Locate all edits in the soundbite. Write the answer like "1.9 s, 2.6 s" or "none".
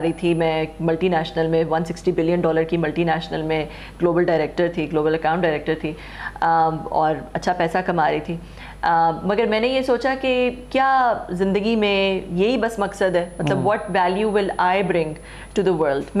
none